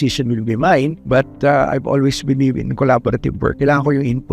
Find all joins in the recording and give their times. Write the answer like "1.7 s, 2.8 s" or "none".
1.0 s, 3.6 s